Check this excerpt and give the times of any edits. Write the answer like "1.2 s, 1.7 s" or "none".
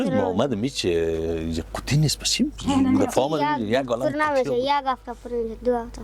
none